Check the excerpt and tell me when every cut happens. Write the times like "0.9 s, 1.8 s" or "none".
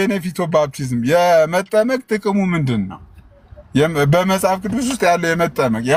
none